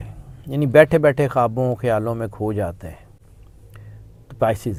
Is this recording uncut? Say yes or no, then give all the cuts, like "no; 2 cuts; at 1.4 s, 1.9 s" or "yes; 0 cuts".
yes; 0 cuts